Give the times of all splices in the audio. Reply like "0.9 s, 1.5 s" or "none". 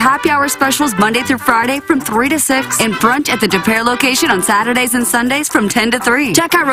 none